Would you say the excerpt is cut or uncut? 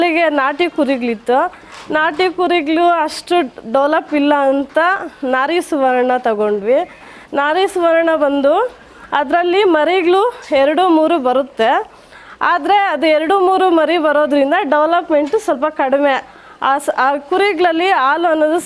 uncut